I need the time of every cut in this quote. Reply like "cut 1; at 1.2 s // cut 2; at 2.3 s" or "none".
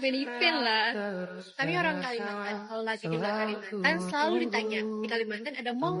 none